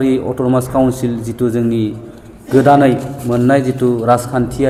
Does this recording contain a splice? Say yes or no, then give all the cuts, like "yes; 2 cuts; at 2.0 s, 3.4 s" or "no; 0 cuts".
no; 0 cuts